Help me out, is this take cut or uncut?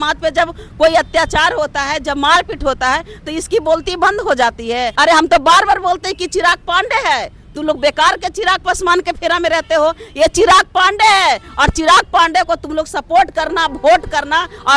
cut